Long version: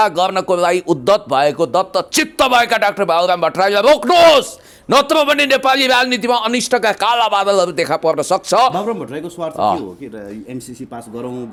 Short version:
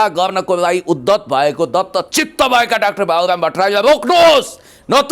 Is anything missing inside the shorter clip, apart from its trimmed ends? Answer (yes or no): no